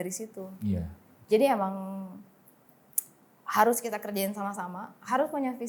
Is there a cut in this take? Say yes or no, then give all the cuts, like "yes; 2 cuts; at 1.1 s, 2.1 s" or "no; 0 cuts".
no; 0 cuts